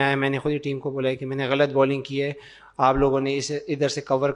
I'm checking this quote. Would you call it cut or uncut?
uncut